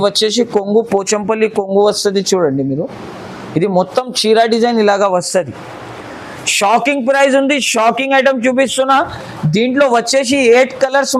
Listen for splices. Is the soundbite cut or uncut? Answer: uncut